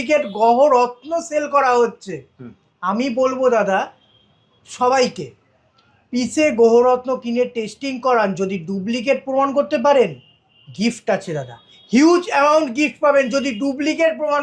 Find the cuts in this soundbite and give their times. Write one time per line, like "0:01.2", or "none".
none